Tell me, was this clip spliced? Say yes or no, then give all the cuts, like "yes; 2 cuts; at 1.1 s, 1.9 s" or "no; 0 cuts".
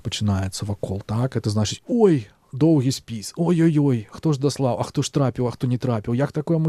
no; 0 cuts